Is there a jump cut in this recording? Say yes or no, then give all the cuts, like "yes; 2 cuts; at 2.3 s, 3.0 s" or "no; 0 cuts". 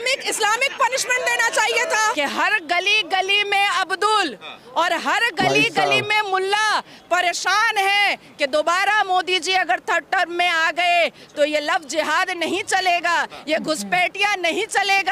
yes; 1 cut; at 2.1 s